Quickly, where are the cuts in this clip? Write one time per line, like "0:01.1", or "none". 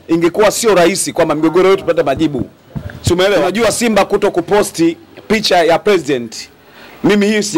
0:03.5